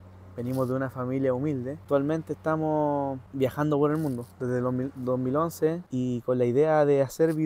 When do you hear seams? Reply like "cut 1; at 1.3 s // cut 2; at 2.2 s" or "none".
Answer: cut 1; at 1.8 s // cut 2; at 3.2 s // cut 3; at 5.8 s